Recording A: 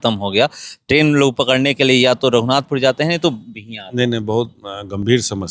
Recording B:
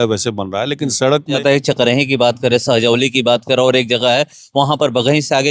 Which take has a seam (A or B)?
B